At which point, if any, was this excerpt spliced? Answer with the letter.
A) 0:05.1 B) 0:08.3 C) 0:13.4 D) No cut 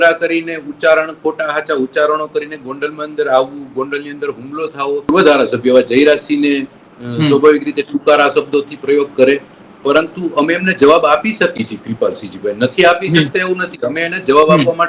A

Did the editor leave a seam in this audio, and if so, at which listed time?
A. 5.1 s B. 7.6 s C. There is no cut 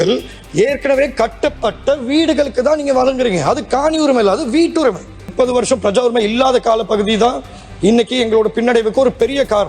A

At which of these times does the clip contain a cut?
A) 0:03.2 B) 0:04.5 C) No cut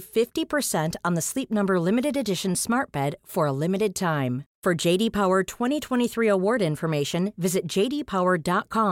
C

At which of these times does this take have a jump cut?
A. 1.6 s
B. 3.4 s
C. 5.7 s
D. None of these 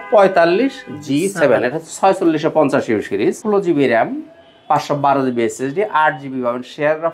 B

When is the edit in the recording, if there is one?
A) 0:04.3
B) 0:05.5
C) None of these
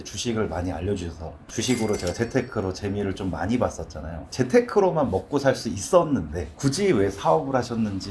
A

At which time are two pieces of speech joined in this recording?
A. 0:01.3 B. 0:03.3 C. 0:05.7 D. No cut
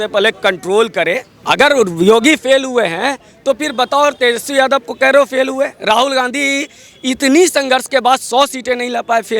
A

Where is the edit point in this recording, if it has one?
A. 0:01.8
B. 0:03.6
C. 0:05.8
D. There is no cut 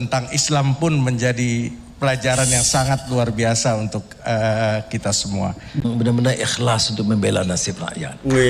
C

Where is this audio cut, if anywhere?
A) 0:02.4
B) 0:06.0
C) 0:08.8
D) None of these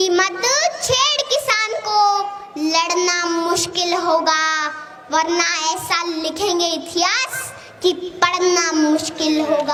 D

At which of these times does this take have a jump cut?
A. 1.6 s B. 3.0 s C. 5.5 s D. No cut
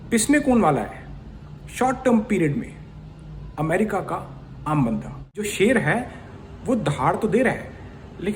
C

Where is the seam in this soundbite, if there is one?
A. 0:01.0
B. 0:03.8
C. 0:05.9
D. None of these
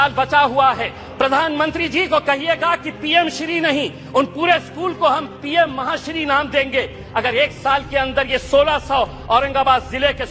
A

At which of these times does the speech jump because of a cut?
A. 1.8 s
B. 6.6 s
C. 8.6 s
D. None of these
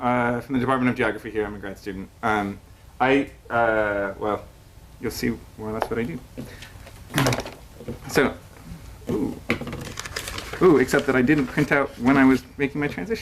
D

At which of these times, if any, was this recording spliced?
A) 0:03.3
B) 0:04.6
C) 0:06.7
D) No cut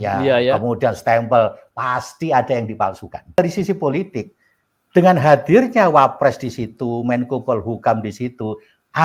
A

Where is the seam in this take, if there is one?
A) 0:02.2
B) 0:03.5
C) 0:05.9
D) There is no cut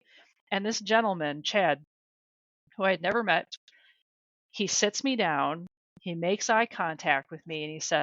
B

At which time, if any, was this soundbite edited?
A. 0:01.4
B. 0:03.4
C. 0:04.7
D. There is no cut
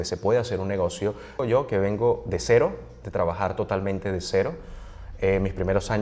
A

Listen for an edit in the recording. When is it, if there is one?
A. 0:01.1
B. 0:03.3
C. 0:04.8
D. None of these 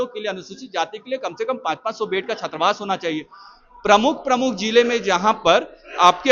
D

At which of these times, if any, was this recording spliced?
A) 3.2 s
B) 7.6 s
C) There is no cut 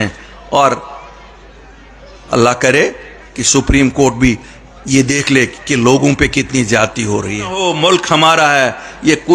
B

